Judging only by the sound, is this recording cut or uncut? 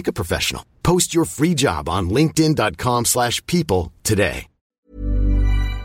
cut